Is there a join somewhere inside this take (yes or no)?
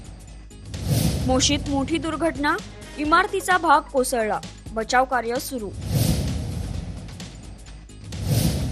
no